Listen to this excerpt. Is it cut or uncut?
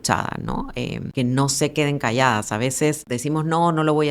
cut